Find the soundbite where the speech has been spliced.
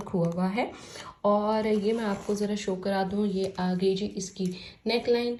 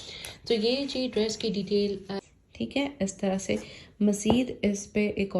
second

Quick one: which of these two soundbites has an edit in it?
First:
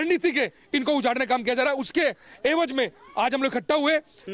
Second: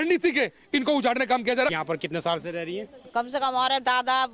second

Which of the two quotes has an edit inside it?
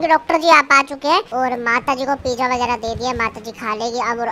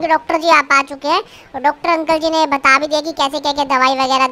first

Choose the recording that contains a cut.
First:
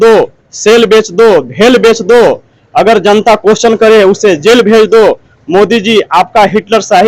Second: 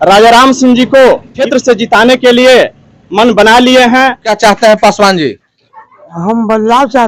second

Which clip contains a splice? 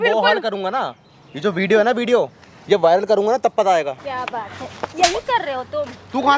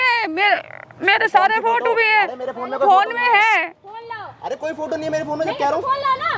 first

